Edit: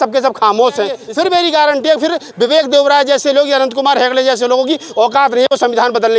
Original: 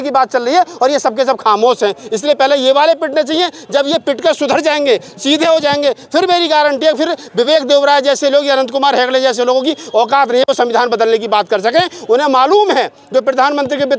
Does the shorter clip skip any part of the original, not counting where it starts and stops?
yes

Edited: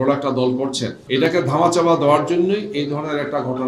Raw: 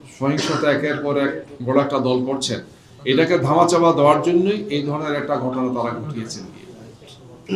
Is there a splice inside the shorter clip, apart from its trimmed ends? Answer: yes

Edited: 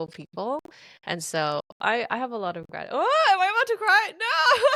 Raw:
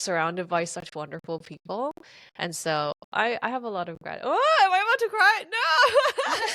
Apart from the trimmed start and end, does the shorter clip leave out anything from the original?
no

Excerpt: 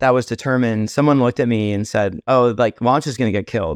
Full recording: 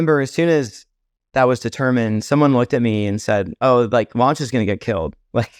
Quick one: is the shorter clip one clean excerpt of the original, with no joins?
yes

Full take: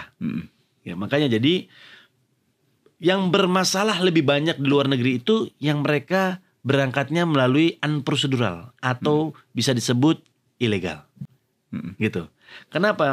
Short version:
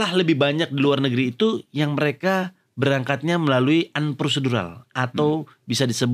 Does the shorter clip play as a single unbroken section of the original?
yes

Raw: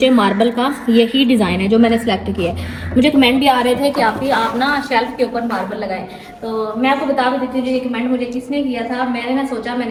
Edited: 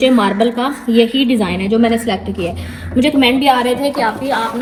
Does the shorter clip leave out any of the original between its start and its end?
no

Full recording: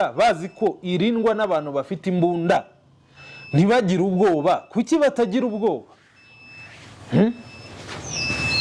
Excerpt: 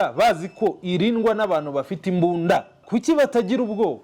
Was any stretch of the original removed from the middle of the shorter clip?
yes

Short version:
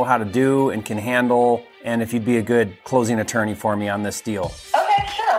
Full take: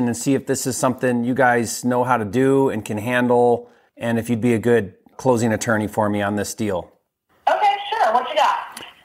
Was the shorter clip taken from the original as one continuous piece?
no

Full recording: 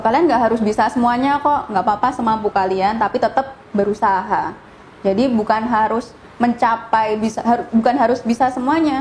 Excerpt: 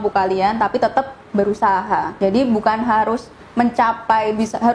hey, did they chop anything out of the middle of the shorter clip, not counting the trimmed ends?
yes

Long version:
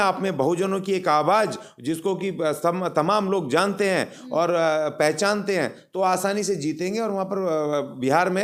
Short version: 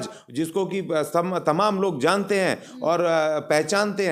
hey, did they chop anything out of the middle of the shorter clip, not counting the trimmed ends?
no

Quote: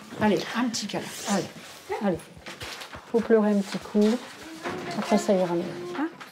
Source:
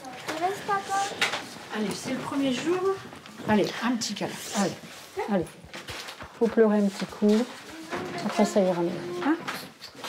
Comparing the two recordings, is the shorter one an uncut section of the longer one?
yes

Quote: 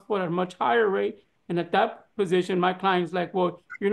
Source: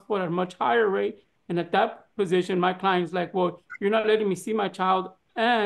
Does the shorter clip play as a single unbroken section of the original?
yes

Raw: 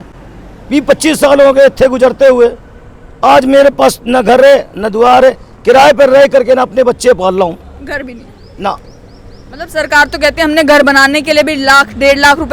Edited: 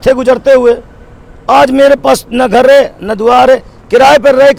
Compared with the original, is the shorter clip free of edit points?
yes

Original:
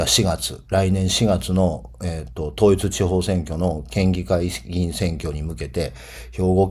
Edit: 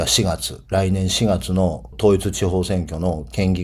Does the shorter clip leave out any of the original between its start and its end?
yes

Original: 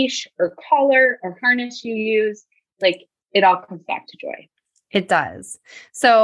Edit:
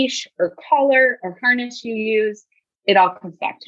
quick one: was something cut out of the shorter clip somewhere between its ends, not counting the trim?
yes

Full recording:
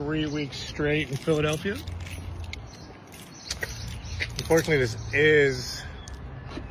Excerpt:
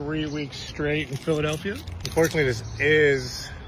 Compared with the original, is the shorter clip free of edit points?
no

